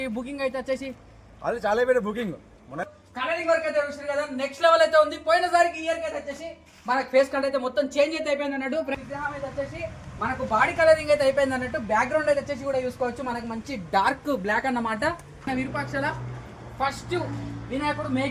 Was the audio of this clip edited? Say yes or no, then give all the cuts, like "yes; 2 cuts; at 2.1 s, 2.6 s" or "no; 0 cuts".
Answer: yes; 3 cuts; at 2.8 s, 8.9 s, 15.5 s